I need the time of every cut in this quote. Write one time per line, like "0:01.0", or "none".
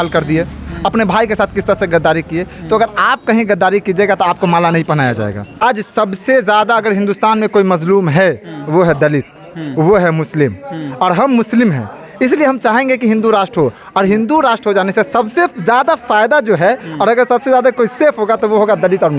0:05.6